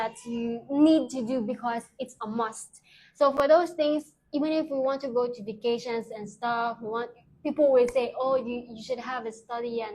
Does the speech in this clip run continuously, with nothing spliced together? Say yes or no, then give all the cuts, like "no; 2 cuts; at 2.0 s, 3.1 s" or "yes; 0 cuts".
yes; 0 cuts